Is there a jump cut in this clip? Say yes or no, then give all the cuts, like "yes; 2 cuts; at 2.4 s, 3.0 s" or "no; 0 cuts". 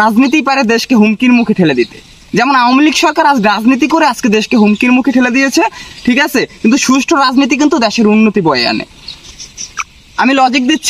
no; 0 cuts